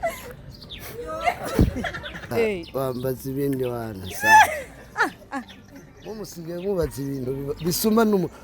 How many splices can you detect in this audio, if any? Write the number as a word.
one